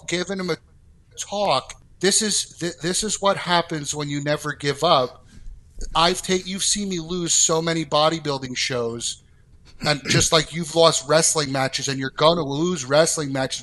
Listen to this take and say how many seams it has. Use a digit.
1